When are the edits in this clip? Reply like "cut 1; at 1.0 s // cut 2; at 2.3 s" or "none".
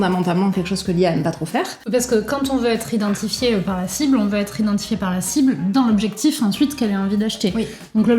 cut 1; at 1.8 s